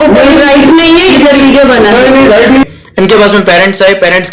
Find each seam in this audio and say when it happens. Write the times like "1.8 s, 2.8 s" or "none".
2.6 s

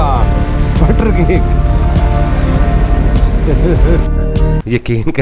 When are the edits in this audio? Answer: none

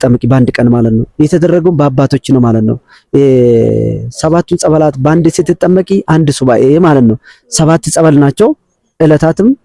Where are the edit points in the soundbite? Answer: none

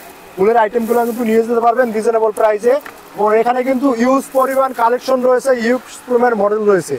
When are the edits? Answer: none

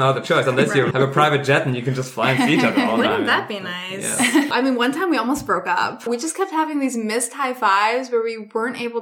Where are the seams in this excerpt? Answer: 0.9 s, 4.5 s, 6.1 s

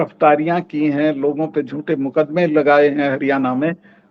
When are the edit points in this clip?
none

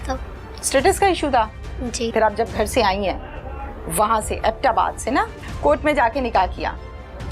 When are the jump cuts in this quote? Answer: 2.1 s, 5.4 s

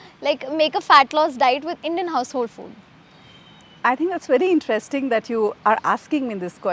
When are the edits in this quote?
none

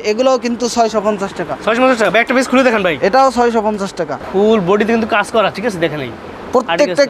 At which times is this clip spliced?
4.1 s

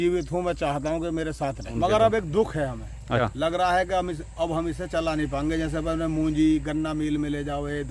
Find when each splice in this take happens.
1.7 s, 3.2 s

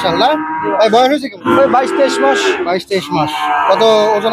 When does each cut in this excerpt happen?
1.3 s

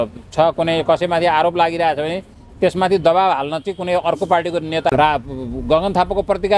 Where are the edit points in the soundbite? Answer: 4.9 s

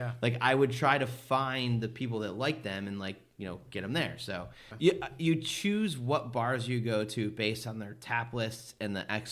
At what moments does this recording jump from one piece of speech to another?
4.6 s

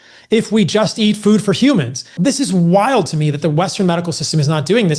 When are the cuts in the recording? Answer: 2.1 s

